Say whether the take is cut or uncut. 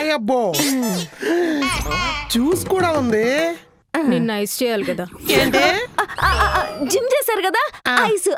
uncut